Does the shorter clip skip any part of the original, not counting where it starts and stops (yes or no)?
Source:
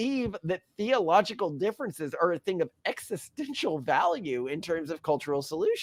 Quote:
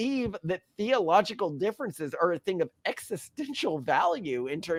no